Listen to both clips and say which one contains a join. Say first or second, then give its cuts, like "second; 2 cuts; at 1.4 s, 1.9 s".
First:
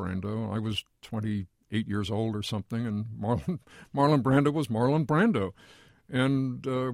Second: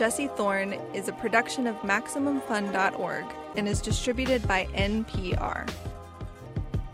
first; 1 cut; at 1.6 s